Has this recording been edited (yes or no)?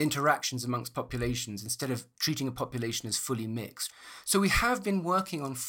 yes